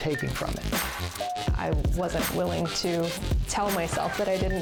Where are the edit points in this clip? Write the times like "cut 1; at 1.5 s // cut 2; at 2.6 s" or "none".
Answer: none